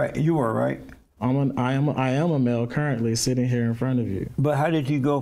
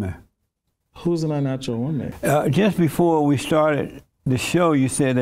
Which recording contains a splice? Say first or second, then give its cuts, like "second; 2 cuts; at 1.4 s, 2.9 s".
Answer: second; 1 cut; at 2.1 s